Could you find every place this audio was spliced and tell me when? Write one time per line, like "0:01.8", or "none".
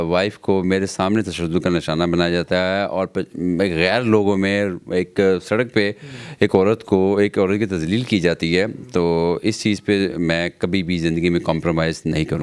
none